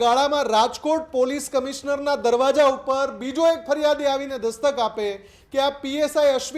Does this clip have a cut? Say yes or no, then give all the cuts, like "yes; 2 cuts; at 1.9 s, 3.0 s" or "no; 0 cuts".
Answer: no; 0 cuts